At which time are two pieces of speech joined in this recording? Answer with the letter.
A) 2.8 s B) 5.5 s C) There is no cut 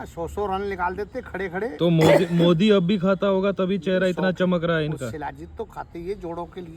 C